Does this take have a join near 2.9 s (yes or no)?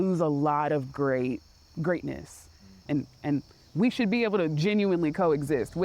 yes